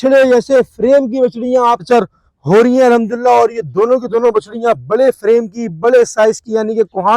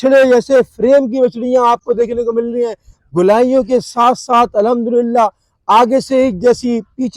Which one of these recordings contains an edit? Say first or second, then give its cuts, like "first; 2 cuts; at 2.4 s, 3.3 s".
first; 1 cut; at 1.8 s